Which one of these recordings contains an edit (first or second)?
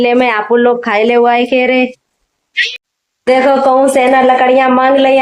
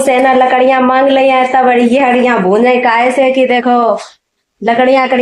first